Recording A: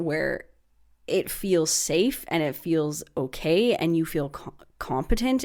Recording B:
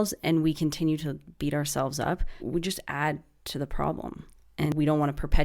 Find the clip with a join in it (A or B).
B